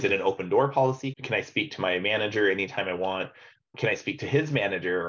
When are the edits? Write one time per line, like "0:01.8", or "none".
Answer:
0:01.1
0:03.7